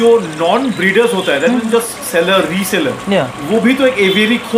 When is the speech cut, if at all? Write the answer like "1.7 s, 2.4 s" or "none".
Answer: none